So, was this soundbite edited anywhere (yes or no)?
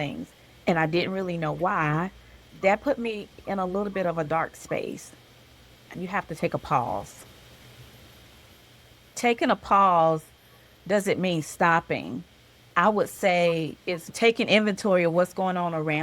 yes